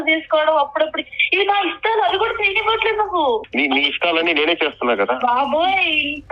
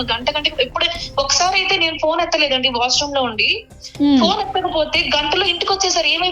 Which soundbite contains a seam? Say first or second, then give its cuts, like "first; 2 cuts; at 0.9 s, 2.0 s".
first; 1 cut; at 3.5 s